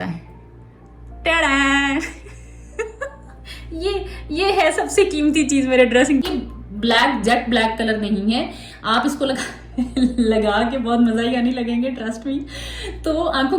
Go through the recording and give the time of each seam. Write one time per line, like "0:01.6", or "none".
0:06.2